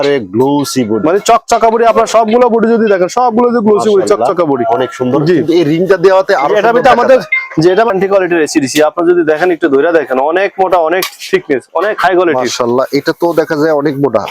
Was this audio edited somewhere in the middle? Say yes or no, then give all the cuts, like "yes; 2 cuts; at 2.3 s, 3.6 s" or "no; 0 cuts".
yes; 1 cut; at 7.9 s